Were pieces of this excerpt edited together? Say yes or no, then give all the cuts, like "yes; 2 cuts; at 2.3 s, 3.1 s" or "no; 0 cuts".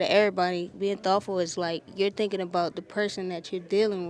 no; 0 cuts